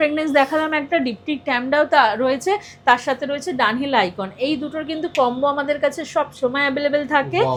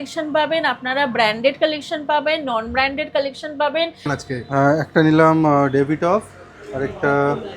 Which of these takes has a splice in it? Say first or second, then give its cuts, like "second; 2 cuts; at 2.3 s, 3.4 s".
second; 1 cut; at 4.2 s